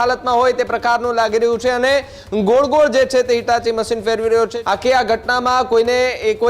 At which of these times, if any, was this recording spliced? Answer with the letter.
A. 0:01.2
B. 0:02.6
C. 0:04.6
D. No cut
C